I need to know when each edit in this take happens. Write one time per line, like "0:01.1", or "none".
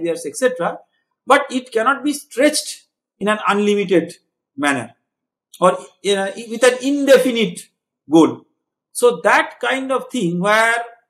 none